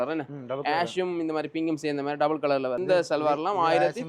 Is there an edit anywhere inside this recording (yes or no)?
yes